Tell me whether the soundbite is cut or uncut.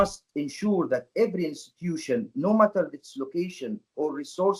uncut